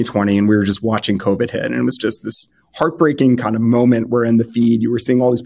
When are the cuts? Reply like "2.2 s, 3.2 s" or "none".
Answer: none

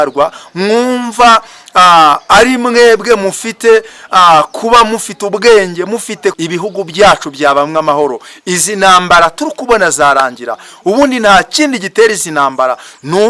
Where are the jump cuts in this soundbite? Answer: 6.4 s

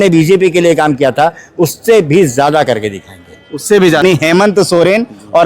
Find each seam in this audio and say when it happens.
4.0 s

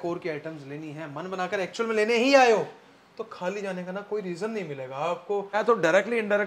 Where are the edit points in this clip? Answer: 5.5 s

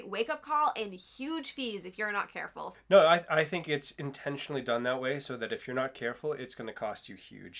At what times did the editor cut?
2.7 s

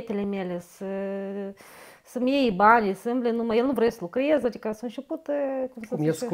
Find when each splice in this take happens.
none

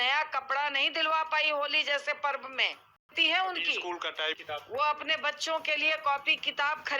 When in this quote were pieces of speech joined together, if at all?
3.0 s, 4.4 s

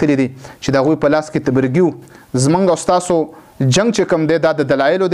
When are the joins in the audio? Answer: 2.1 s

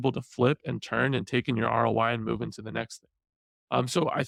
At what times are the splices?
none

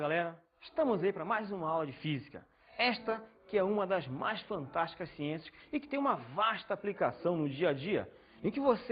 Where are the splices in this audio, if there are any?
4.2 s

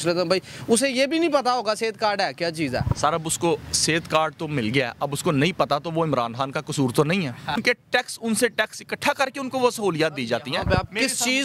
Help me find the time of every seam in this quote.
7.6 s

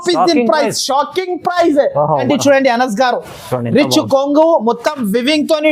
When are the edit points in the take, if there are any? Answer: 2.2 s

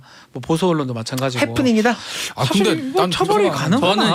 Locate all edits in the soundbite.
none

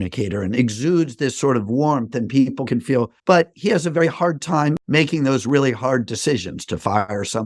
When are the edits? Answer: 2.9 s, 4.8 s

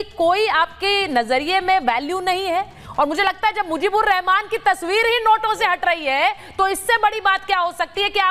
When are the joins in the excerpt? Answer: 2.8 s

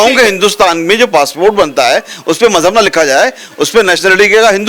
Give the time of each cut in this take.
none

